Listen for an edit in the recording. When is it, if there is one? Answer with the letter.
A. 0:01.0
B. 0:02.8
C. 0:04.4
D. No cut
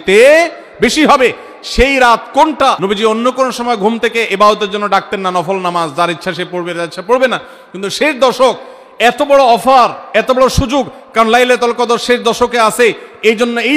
B